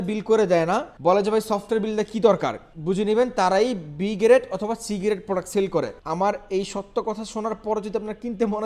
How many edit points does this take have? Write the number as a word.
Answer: three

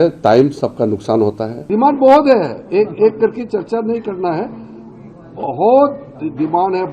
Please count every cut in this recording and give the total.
one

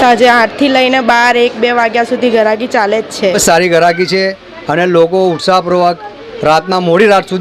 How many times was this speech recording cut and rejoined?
one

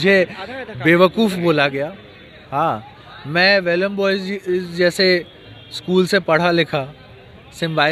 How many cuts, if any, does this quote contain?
zero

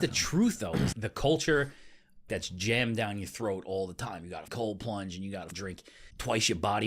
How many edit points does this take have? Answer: four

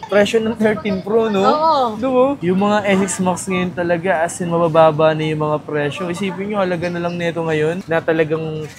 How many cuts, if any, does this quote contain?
two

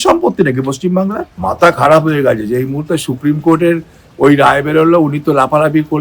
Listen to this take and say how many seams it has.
one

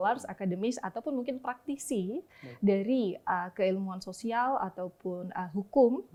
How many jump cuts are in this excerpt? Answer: zero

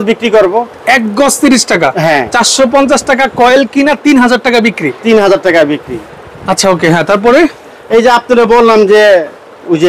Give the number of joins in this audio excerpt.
zero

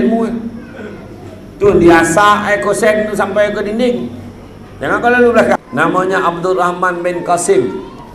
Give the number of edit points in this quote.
one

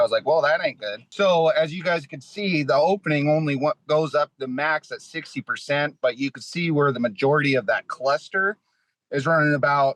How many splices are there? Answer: one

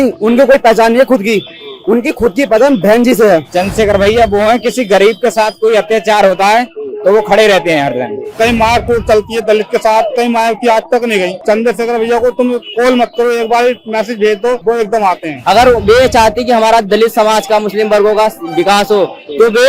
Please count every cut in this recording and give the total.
four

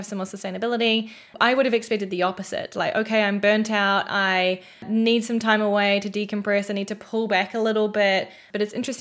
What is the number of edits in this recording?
one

